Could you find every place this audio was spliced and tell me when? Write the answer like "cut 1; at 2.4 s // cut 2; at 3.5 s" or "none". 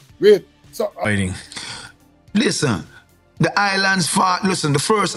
cut 1; at 1.1 s